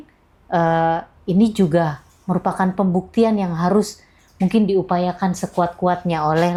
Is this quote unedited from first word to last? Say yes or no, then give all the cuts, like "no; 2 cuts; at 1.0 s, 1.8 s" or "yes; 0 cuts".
yes; 0 cuts